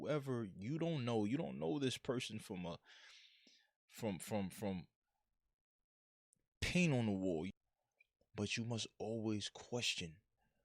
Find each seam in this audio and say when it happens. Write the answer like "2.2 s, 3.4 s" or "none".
7.5 s